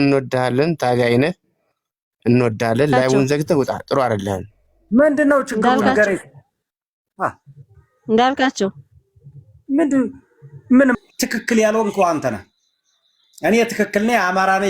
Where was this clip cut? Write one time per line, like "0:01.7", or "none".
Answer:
0:11.0